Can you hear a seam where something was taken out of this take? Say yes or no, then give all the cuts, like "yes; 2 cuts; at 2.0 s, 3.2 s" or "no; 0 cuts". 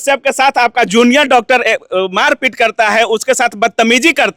no; 0 cuts